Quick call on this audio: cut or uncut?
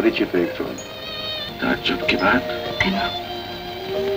cut